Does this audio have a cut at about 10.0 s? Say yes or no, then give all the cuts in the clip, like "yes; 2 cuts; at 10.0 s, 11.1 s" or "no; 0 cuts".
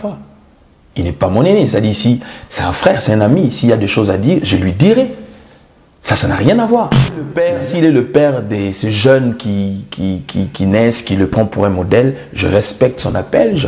no; 1 cut; at 7.3 s